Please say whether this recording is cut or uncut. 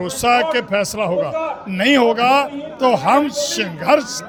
uncut